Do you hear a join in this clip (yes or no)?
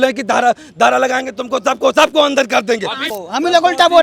yes